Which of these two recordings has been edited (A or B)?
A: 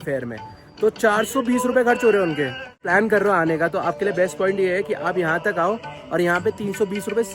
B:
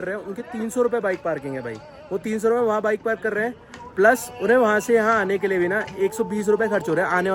A